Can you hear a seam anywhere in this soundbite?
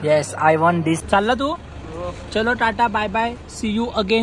yes; 1 cut; at 1.0 s

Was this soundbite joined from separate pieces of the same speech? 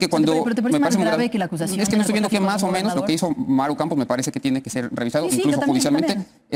no; 0 cuts

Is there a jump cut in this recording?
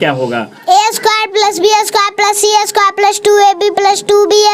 no; 0 cuts

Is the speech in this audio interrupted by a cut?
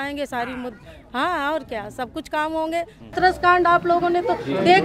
yes; 1 cut; at 3.1 s

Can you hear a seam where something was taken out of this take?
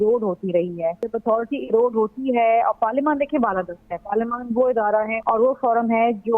yes; 2 cuts; at 1.1 s, 5.2 s

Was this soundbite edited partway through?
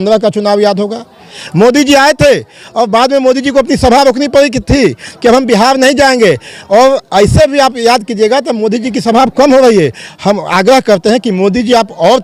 no; 0 cuts

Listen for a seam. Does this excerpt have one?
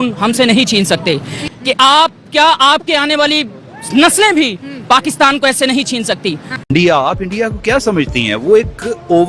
yes; 1 cut; at 6.7 s

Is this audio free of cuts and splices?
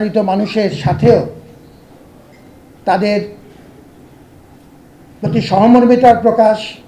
yes; 0 cuts

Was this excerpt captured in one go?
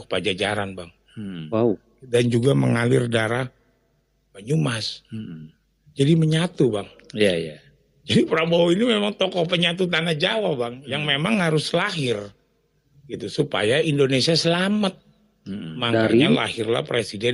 yes; 0 cuts

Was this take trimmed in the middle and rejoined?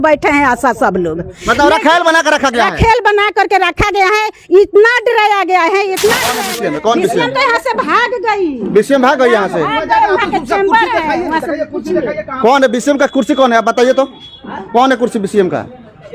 yes; 1 cut; at 6.4 s

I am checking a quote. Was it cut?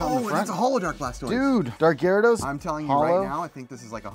yes; 1 cut; at 1.7 s

